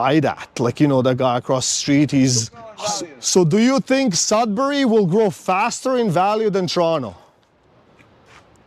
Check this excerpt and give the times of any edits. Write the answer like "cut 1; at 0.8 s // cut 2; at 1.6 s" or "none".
cut 1; at 2.6 s